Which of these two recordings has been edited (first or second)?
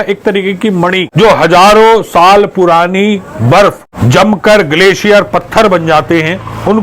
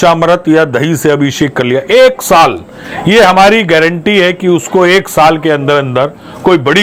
first